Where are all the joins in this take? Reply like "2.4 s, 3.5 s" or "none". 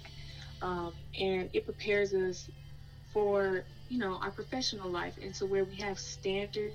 3.8 s